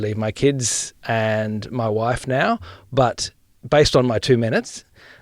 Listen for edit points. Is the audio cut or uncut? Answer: cut